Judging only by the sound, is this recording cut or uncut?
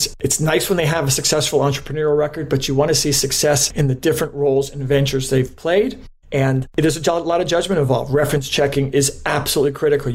uncut